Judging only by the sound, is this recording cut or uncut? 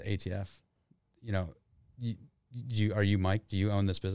uncut